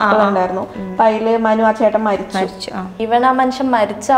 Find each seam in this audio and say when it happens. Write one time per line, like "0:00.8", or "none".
0:03.0